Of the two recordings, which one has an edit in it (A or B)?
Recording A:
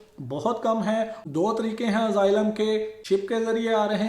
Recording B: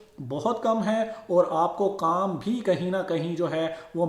A